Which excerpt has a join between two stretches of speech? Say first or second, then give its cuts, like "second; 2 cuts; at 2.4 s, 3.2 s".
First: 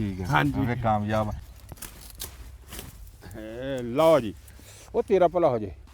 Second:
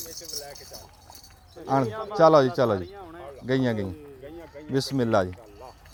first; 1 cut; at 1.4 s